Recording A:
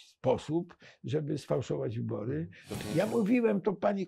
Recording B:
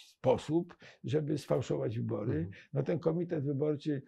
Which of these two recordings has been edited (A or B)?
A